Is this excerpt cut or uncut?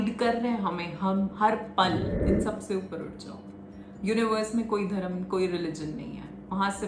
cut